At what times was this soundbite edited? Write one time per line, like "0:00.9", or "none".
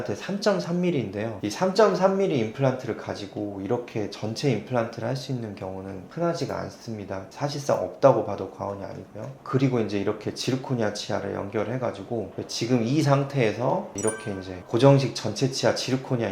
0:09.4
0:12.3